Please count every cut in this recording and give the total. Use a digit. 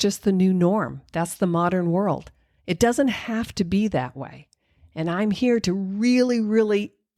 0